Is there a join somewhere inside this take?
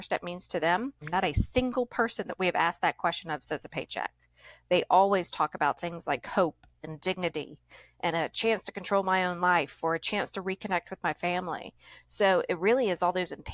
yes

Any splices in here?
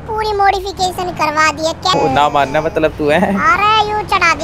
yes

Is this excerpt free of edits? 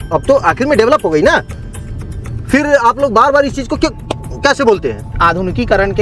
no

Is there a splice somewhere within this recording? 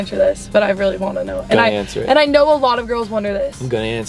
no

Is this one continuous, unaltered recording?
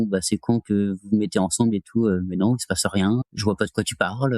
no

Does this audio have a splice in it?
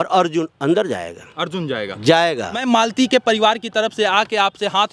yes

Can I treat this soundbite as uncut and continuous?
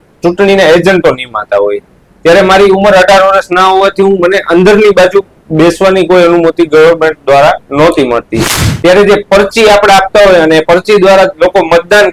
yes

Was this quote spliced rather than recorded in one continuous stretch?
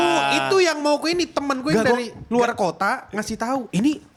no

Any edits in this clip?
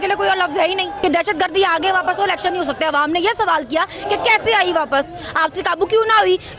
yes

